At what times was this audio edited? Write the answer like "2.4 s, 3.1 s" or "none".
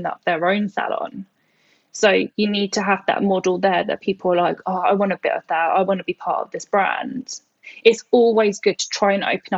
7.6 s